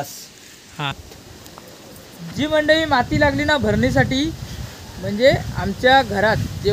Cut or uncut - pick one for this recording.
cut